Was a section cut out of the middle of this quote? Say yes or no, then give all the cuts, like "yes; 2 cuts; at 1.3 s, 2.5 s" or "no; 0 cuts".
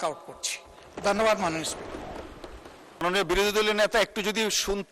yes; 1 cut; at 3.0 s